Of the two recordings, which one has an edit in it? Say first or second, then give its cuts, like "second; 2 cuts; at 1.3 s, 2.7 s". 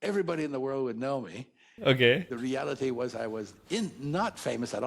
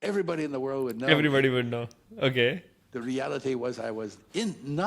first; 2 cuts; at 1.2 s, 2.3 s